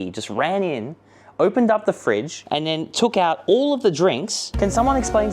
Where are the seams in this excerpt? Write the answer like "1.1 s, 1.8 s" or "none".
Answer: 2.4 s, 4.5 s